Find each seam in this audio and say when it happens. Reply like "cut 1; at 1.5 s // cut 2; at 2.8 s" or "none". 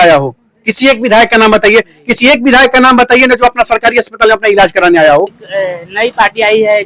cut 1; at 5.4 s